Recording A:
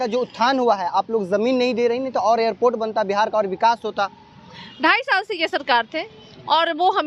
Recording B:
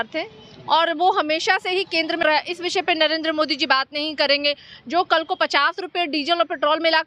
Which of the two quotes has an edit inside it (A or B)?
B